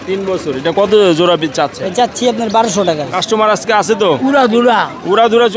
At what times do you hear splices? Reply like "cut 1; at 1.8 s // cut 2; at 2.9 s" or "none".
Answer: cut 1; at 3.2 s